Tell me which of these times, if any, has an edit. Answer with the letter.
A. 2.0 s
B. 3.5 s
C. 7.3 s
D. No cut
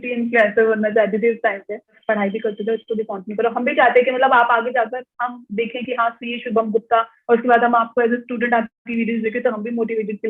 A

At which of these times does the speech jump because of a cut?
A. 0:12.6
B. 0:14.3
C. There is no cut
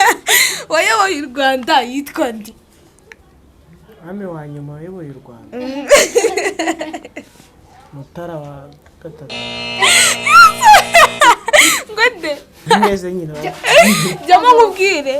A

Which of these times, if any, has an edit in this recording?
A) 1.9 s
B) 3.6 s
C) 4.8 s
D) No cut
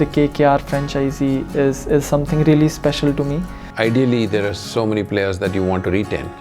B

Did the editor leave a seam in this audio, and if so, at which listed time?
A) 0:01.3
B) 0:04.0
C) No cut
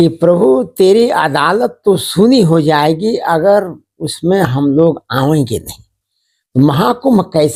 C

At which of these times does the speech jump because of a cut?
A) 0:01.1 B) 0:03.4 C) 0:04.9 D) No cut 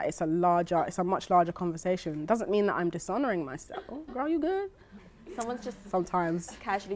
C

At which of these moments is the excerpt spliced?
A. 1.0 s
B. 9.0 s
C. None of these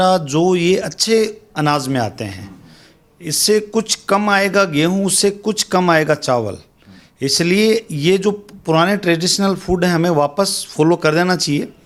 C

